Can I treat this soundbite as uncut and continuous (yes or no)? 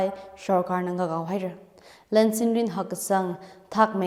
yes